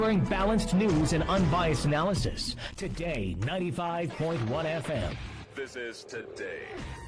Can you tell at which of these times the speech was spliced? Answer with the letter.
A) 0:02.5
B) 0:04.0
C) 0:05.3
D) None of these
C